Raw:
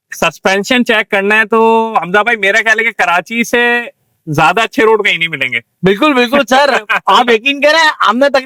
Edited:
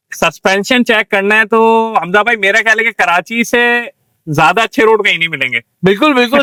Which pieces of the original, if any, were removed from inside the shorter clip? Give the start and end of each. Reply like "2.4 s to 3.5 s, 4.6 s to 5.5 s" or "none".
none